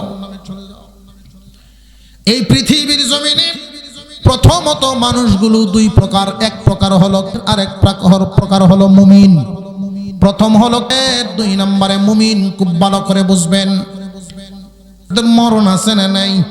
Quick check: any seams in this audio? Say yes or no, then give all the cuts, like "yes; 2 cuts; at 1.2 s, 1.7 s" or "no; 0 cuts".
yes; 3 cuts; at 7.3 s, 10.9 s, 15.1 s